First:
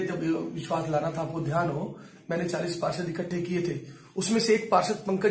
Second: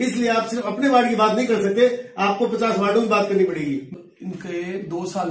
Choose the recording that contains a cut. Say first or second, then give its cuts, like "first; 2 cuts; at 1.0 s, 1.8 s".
second; 1 cut; at 3.9 s